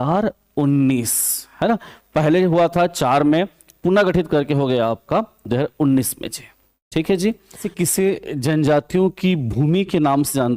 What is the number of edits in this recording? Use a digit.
1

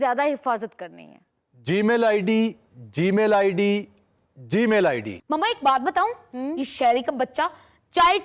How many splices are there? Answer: 1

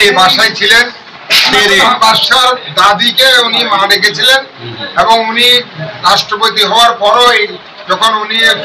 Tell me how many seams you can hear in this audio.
1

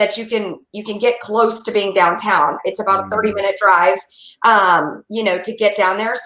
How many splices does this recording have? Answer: 0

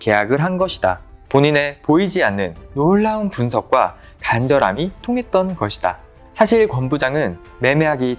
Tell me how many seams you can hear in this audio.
1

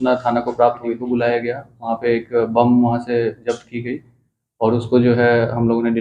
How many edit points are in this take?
1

